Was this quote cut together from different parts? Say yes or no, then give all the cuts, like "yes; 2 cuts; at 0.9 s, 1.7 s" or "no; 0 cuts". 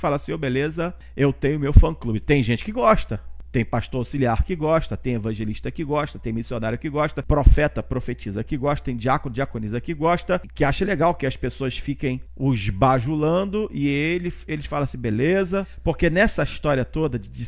yes; 1 cut; at 15.7 s